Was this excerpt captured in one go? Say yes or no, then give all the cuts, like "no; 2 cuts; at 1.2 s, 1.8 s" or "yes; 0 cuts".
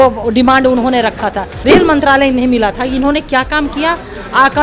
no; 1 cut; at 1.5 s